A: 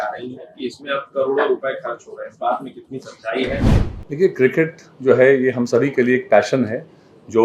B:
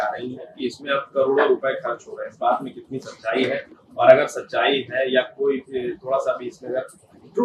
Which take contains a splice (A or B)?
A